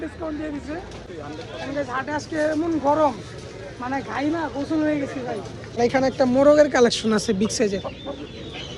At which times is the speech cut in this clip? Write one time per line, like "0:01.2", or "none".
0:01.0
0:05.8